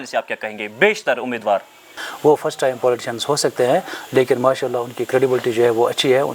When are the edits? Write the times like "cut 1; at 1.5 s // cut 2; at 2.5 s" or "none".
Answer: cut 1; at 2.0 s